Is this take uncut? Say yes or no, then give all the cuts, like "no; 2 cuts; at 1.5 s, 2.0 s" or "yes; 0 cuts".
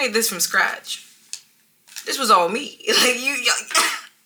yes; 0 cuts